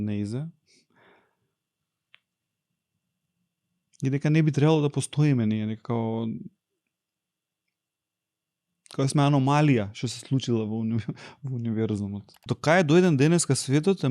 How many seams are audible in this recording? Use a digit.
1